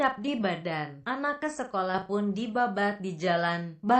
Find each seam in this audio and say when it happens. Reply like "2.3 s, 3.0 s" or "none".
2.2 s